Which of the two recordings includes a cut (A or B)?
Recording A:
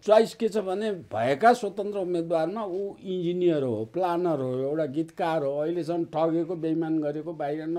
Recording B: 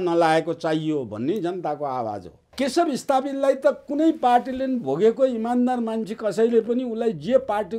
B